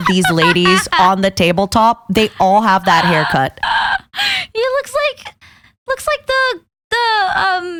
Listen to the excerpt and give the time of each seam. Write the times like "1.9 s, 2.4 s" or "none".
none